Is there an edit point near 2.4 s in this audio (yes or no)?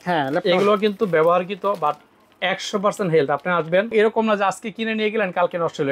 no